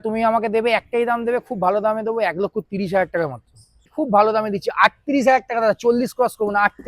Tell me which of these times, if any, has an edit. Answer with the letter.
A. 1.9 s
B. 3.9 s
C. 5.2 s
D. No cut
B